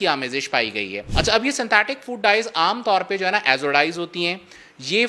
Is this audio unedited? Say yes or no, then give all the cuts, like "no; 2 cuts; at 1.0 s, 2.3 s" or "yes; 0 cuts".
yes; 0 cuts